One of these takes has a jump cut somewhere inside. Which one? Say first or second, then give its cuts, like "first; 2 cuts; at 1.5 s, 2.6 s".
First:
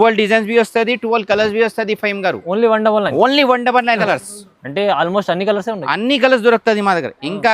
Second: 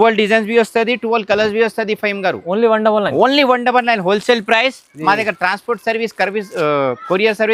first; 1 cut; at 4.0 s